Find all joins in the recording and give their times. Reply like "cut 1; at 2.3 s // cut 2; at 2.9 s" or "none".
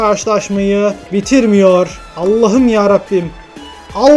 cut 1; at 1.0 s // cut 2; at 2.0 s